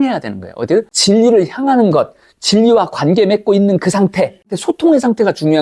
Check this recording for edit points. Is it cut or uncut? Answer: cut